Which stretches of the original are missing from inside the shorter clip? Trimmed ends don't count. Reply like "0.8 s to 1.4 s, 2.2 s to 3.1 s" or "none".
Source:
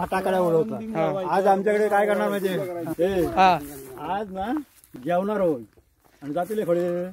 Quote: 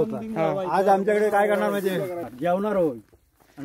2.8 s to 4.8 s

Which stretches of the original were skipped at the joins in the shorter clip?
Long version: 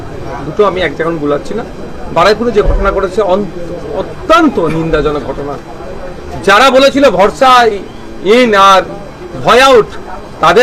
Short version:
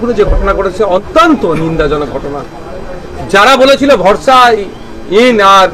3.4 s to 4.2 s

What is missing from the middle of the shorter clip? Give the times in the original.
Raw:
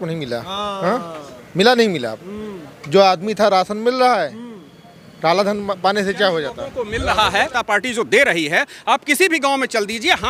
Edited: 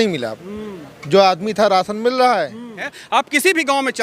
4.7 s to 8.7 s

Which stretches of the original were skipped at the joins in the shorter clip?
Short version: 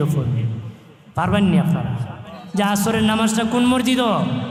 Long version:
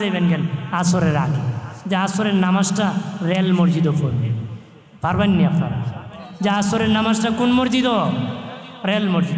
none

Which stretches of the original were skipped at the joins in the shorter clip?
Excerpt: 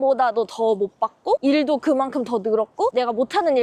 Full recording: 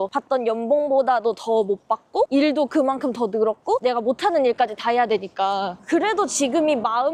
none

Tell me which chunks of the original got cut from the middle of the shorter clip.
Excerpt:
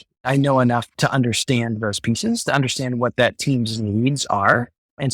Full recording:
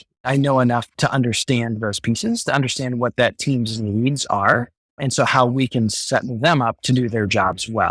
none

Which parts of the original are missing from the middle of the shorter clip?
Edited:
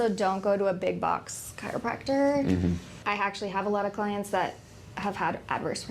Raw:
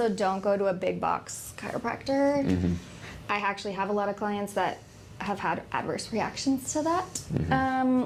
2.9 s to 3.1 s

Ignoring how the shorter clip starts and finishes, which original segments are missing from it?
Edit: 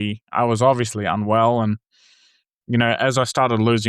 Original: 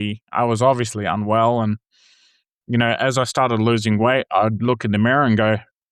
none

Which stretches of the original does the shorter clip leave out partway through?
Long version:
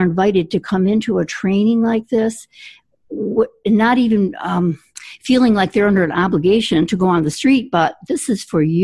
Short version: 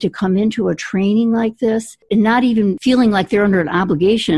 2.5 s to 3.5 s, 4.3 s to 5.2 s

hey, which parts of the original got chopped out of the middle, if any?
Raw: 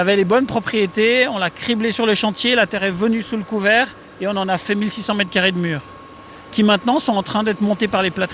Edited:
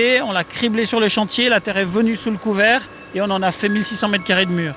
none

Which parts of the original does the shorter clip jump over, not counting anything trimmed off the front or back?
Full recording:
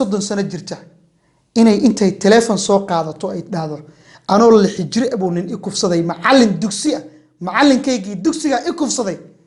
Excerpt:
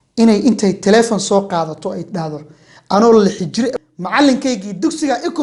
5.2 s to 7.2 s

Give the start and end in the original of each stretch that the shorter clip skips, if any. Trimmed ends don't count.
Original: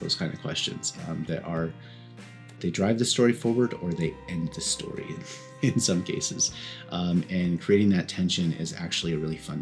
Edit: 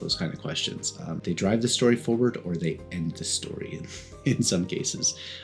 1.2 s to 2.6 s

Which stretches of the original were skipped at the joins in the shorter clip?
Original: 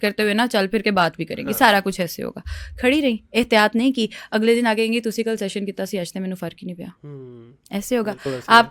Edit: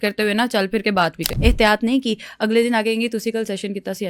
1.3 s to 3.2 s

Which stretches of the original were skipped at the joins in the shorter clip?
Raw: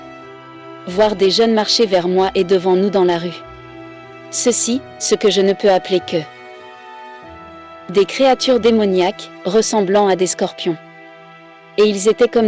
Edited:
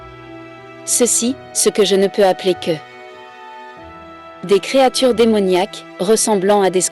none

